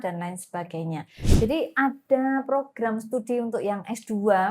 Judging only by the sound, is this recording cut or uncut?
cut